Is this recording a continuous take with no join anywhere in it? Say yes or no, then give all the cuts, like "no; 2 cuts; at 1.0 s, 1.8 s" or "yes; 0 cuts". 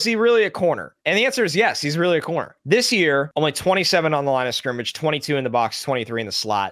no; 3 cuts; at 0.9 s, 2.5 s, 3.3 s